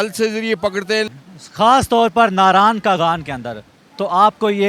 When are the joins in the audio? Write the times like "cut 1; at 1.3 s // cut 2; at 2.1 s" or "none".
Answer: cut 1; at 1.1 s